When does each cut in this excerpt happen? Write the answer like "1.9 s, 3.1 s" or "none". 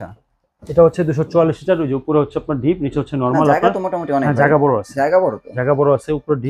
none